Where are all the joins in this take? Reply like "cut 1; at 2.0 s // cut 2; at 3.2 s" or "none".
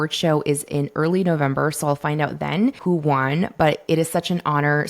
cut 1; at 2.8 s